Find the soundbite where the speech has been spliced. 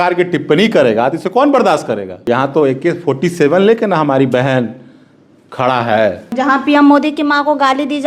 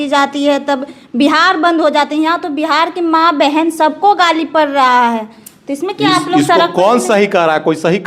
first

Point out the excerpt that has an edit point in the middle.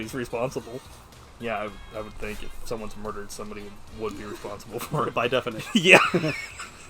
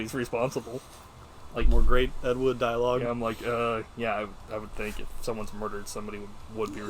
first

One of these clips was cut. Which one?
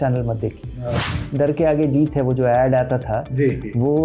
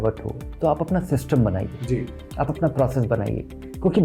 first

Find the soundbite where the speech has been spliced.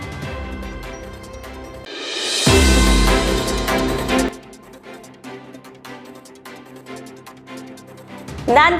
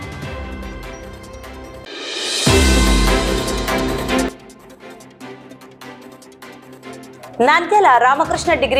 first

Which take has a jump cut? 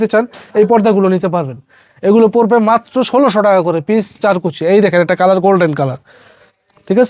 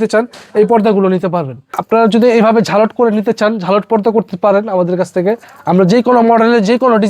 second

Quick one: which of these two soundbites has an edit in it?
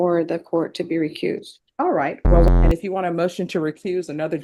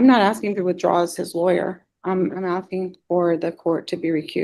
first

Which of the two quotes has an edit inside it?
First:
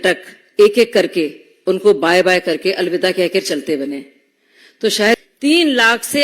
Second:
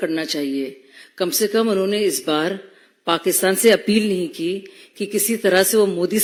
first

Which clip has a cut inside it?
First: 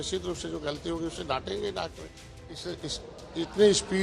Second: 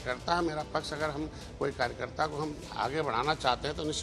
first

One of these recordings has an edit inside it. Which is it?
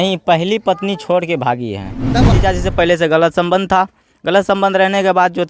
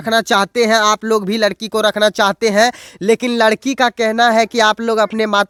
first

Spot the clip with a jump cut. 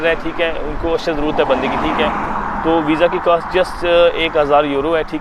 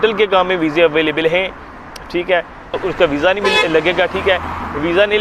second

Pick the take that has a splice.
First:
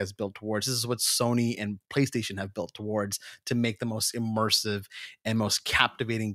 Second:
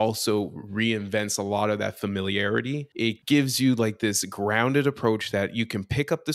second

